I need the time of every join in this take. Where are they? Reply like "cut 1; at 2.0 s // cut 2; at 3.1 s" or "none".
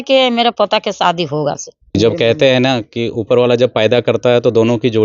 cut 1; at 1.9 s